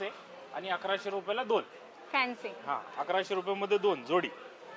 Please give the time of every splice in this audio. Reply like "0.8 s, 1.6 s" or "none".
none